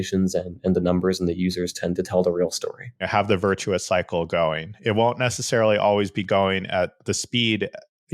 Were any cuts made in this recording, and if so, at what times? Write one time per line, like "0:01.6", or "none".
0:03.0